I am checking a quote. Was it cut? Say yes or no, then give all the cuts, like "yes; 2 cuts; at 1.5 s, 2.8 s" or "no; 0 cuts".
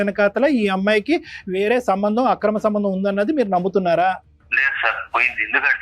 yes; 1 cut; at 4.3 s